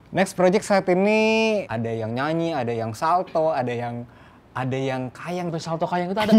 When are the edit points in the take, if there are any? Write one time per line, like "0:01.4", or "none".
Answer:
0:01.7
0:05.5